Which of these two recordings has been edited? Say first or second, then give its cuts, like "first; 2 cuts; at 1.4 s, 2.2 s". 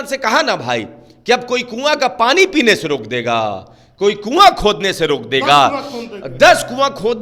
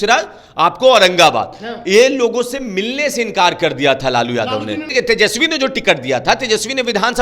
second; 1 cut; at 4.8 s